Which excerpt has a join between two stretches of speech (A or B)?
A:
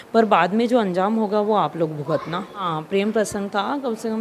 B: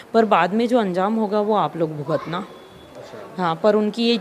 A